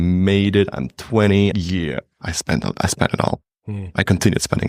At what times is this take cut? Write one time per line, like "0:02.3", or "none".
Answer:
0:01.5